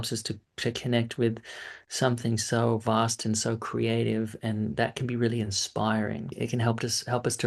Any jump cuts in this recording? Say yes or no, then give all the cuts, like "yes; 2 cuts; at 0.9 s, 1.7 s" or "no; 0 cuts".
yes; 1 cut; at 6.3 s